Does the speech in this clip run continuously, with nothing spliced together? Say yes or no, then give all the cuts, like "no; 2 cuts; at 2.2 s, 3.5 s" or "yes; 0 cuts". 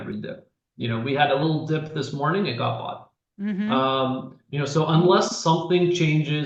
yes; 0 cuts